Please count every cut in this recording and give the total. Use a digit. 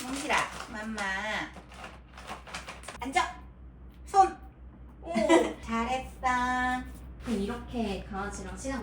0